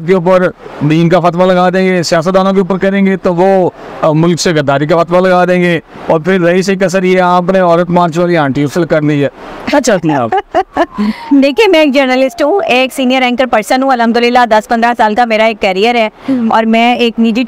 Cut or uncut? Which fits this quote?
uncut